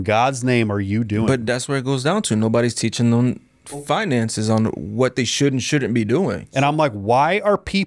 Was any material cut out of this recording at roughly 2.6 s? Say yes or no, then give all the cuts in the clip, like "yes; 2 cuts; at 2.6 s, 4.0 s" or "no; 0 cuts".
no; 1 cut; at 6.4 s